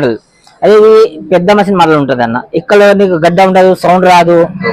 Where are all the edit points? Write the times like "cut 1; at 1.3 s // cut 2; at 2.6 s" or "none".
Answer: none